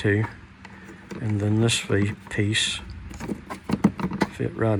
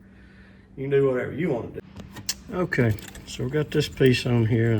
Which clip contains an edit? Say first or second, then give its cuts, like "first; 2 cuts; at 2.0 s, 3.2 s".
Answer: second; 1 cut; at 1.7 s